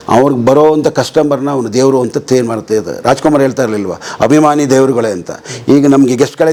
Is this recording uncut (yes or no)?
yes